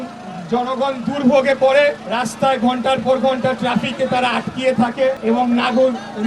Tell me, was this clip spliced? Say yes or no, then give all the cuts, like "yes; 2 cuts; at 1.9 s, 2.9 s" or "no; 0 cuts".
yes; 2 cuts; at 2.1 s, 5.2 s